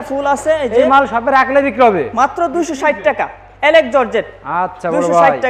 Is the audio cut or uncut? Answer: uncut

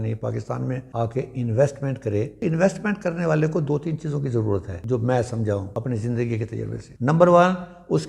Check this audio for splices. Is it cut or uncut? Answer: cut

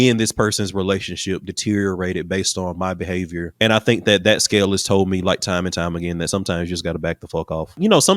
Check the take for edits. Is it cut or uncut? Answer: cut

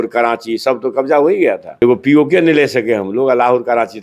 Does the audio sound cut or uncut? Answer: cut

